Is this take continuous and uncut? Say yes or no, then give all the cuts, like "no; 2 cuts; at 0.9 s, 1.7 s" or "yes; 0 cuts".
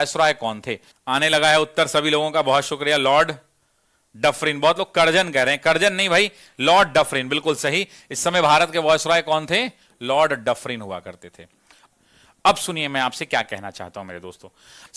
yes; 0 cuts